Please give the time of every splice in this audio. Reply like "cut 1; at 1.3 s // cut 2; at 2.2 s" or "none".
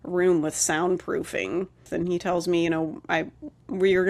cut 1; at 1.9 s